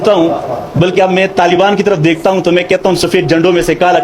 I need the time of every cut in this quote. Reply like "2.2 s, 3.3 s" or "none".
none

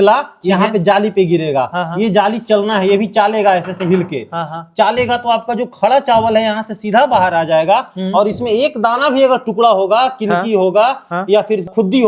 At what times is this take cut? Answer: none

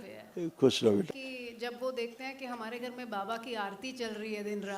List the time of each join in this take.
1.1 s

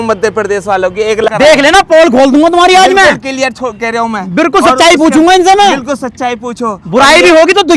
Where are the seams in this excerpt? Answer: 1.3 s

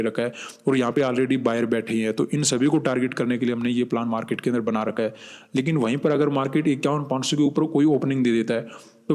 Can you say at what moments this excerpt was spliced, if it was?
5.9 s

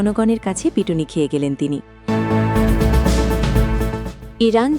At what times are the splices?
2.0 s

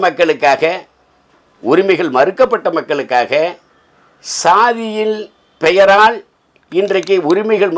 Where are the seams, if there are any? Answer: none

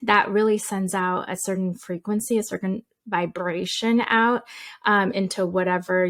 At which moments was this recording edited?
none

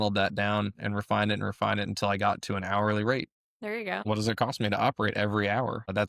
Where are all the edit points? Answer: none

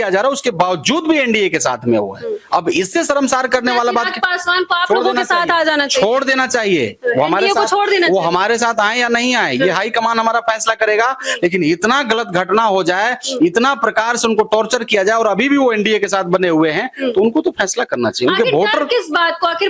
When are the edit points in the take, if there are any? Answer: none

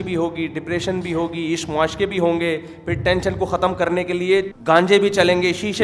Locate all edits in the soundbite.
4.5 s

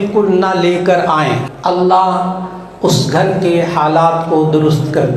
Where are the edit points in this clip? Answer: 1.4 s

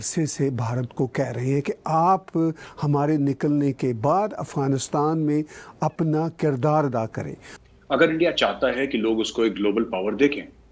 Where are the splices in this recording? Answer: 7.6 s

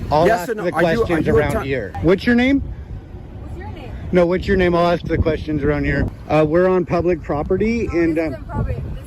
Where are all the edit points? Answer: 1.9 s, 6.2 s

